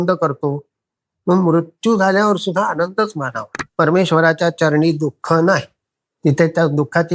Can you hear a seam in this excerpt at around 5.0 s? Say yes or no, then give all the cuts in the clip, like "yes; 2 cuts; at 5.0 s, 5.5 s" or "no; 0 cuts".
no; 1 cut; at 3.6 s